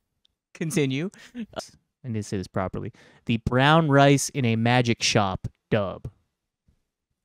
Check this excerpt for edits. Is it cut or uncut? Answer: cut